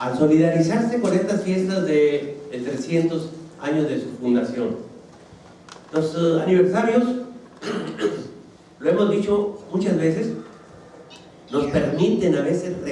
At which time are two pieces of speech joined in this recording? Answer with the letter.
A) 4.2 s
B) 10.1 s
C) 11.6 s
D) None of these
A